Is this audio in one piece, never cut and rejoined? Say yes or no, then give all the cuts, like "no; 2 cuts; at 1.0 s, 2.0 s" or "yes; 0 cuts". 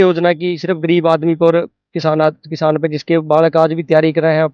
yes; 0 cuts